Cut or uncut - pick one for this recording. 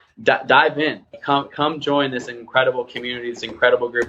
cut